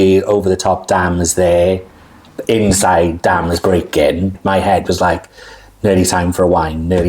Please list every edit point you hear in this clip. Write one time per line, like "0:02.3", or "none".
0:04.4